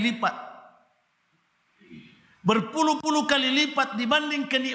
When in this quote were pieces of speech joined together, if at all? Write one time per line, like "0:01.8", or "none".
none